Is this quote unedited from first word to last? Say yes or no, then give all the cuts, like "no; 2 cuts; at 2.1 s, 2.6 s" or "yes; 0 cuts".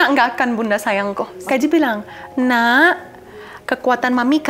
no; 1 cut; at 1.3 s